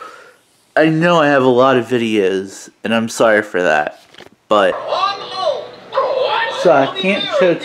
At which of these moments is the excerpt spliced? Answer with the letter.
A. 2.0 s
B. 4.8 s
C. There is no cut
B